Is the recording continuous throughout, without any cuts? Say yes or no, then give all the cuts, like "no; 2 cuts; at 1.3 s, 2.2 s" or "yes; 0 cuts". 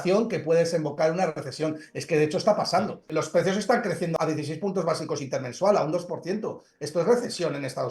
no; 2 cuts; at 3.1 s, 4.1 s